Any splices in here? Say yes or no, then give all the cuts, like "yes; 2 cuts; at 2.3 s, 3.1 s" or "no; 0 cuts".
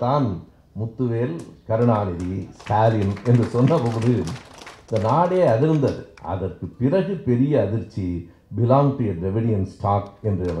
no; 0 cuts